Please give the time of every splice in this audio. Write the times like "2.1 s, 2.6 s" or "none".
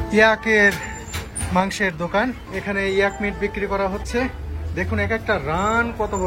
2.5 s